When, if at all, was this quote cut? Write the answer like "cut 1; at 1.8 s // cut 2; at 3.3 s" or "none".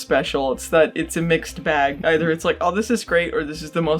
cut 1; at 2.0 s